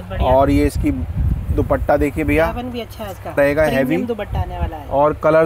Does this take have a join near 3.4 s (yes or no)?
yes